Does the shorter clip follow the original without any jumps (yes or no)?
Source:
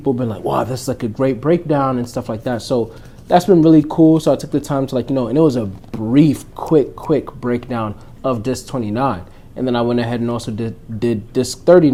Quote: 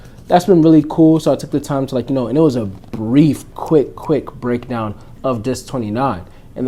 yes